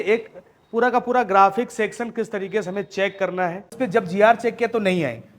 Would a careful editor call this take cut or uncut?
cut